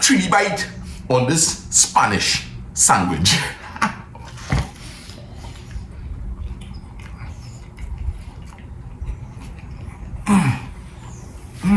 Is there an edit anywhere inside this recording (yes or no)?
no